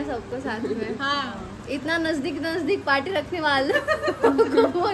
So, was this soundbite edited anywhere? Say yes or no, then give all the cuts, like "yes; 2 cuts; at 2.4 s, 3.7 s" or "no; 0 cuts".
no; 0 cuts